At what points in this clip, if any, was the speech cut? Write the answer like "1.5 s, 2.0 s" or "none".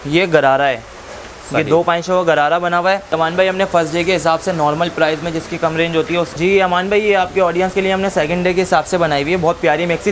3.0 s, 6.3 s